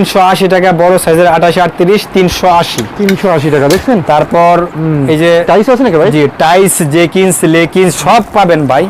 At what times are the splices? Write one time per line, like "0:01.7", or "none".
none